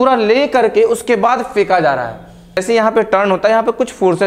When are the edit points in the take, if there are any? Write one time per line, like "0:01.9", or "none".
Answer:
0:02.6